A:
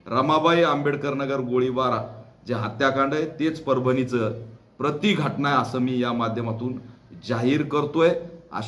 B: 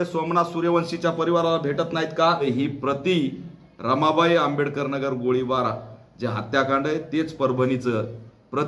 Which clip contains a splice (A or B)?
B